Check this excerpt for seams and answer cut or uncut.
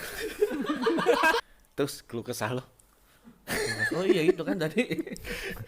cut